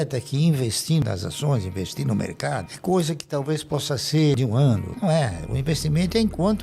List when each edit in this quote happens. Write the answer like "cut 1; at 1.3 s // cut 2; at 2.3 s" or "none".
cut 1; at 1.0 s // cut 2; at 4.7 s